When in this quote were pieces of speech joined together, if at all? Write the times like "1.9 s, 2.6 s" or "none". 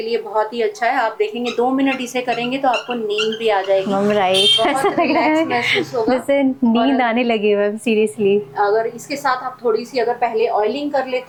none